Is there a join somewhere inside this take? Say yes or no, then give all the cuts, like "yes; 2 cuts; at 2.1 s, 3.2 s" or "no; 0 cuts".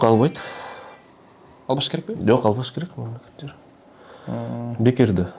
no; 0 cuts